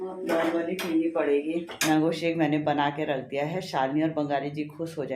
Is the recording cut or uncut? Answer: cut